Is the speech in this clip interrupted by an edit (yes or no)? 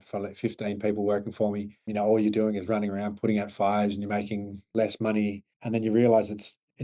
yes